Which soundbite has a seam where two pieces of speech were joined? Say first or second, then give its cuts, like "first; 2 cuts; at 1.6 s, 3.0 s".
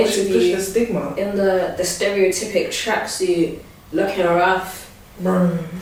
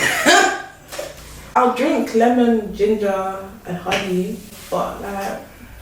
second; 1 cut; at 1.4 s